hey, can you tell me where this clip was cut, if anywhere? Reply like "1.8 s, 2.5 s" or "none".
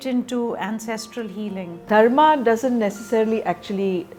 none